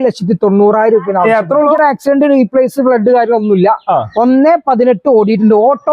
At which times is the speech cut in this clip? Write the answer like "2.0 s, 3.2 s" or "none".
1.8 s